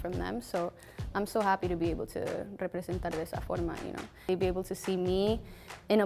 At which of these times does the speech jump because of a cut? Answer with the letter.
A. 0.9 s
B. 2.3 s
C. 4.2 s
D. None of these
C